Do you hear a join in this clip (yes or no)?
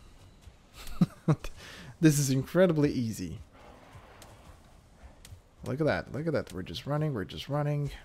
no